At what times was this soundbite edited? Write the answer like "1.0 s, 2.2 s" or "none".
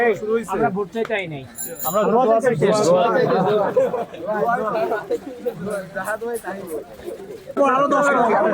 7.3 s